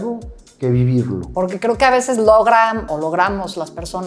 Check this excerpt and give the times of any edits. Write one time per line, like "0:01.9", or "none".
0:01.3
0:02.9